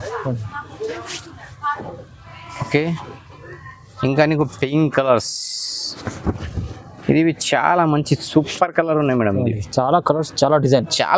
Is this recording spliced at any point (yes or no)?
no